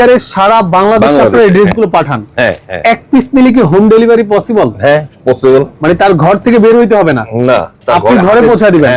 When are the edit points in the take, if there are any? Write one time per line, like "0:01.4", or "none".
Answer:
none